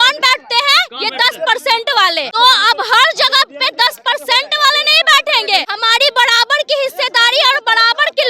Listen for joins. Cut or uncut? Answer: cut